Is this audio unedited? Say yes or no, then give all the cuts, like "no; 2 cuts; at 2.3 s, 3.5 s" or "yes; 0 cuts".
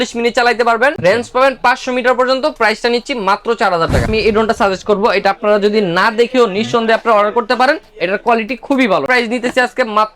no; 2 cuts; at 4.1 s, 9.1 s